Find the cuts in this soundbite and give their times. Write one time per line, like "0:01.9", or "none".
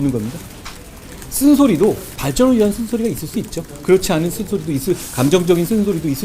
0:02.1

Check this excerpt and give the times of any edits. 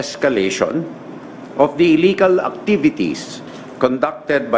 none

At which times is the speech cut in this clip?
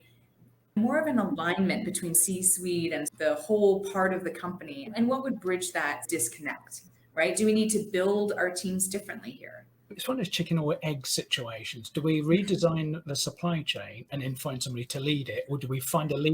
0:02.2
0:04.9
0:10.0

